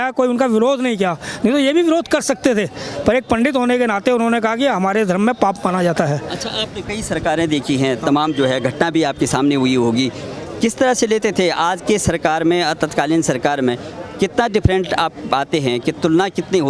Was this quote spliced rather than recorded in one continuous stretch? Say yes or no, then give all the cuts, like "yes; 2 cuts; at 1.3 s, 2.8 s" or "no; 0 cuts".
no; 0 cuts